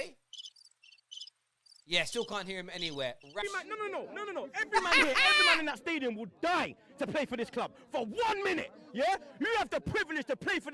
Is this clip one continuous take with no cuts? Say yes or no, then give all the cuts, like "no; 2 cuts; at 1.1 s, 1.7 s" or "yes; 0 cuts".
no; 1 cut; at 3.4 s